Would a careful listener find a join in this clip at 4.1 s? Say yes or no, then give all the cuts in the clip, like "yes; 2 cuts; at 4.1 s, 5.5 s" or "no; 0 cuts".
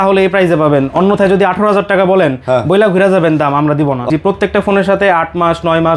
yes; 1 cut; at 4.1 s